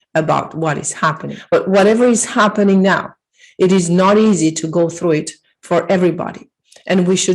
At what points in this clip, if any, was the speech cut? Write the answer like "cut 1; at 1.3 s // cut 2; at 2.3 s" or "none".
cut 1; at 1.3 s